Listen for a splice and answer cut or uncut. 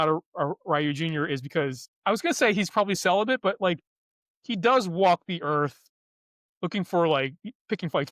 cut